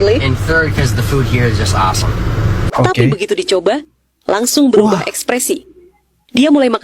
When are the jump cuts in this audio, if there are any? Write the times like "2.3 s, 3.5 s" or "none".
2.5 s